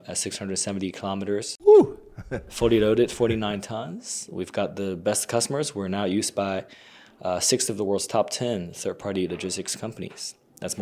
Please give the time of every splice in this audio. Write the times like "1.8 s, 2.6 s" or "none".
none